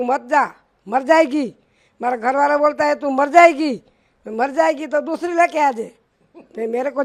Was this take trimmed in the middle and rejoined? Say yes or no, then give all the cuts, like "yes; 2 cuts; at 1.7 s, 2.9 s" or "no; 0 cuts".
no; 0 cuts